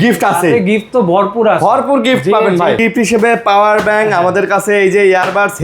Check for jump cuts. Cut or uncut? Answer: cut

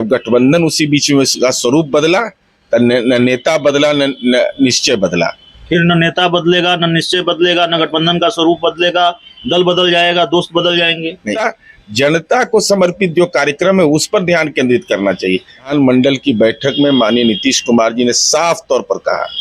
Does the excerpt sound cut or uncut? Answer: cut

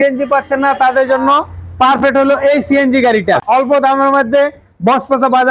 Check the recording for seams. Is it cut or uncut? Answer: cut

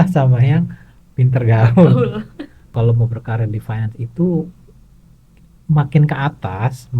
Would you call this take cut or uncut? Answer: cut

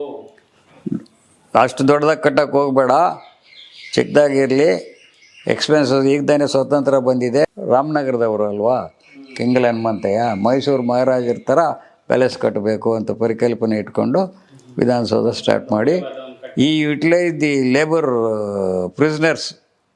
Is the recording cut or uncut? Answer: uncut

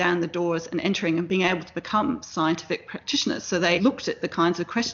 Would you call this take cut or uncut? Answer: cut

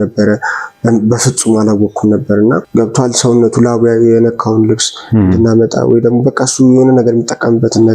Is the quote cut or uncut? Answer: cut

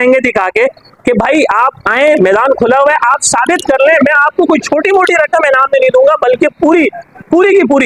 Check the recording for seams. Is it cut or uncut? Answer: uncut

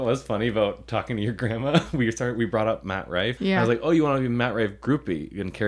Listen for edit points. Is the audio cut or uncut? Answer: cut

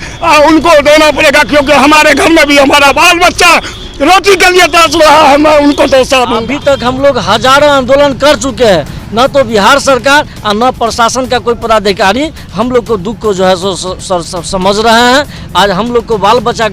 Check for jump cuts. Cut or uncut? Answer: cut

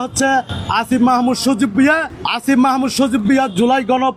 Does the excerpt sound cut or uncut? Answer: cut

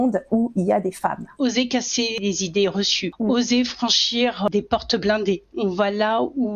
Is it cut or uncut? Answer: cut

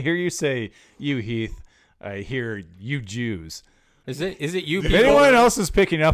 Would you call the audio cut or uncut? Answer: cut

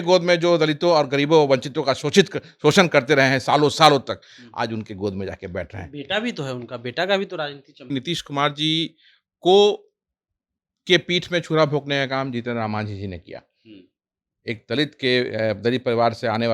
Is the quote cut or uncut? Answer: cut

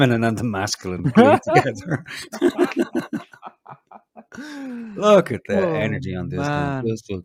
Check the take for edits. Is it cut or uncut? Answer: uncut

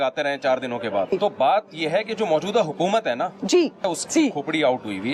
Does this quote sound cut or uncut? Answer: cut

